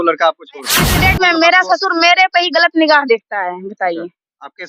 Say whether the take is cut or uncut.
cut